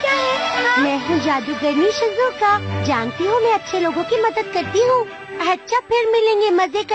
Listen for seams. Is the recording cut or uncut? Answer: cut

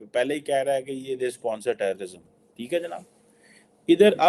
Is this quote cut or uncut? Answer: uncut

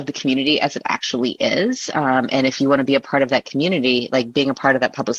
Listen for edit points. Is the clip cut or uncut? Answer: uncut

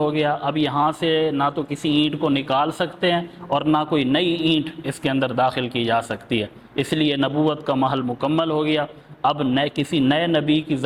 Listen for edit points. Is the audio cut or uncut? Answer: uncut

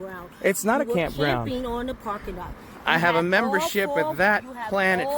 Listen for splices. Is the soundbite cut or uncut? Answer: uncut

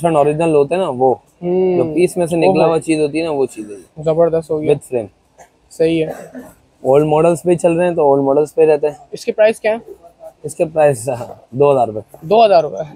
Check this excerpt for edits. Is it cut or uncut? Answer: uncut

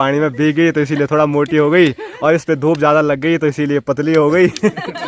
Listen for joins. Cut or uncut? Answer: uncut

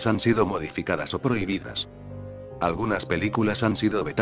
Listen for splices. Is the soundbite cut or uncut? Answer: uncut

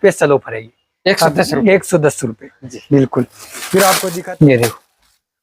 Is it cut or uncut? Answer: cut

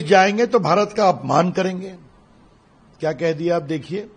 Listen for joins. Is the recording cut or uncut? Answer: uncut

